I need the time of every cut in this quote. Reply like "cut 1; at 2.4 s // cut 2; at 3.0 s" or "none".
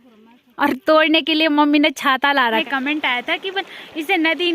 cut 1; at 2.6 s